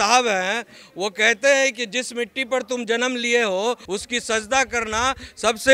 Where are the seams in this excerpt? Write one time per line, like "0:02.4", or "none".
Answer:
0:03.8

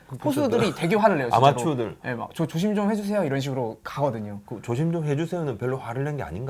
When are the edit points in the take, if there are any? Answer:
none

